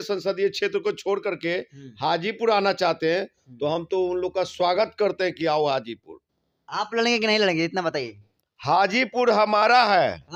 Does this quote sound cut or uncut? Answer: uncut